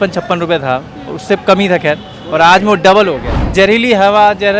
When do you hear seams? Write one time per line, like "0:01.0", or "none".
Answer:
0:03.4